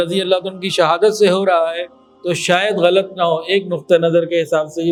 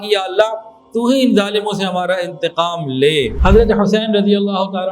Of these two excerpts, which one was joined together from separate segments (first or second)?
second